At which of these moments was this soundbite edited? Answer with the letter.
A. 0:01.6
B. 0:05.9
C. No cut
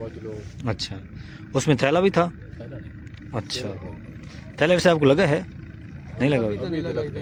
C